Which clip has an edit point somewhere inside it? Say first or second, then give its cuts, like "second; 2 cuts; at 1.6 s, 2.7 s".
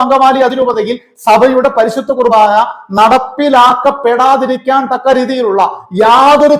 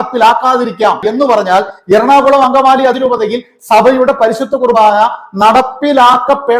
second; 1 cut; at 1.1 s